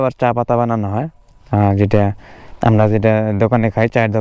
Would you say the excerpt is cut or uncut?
uncut